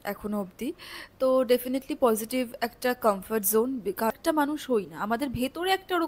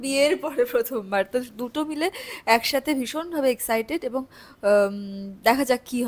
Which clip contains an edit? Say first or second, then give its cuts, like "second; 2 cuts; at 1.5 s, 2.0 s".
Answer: first; 1 cut; at 4.1 s